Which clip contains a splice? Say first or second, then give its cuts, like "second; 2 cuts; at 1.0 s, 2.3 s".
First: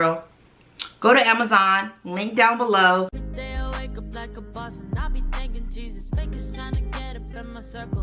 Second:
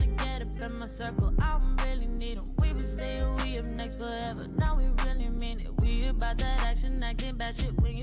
first; 1 cut; at 3.2 s